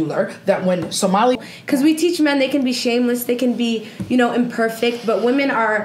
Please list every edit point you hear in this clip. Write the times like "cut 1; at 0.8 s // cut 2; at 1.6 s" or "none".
cut 1; at 1.4 s